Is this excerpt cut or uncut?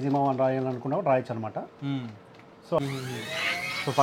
cut